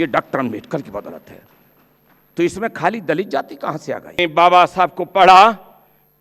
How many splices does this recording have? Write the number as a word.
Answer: one